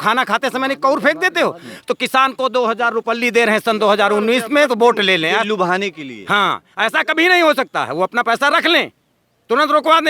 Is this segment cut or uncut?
uncut